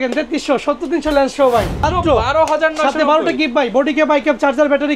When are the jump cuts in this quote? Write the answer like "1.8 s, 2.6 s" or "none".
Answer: 1.8 s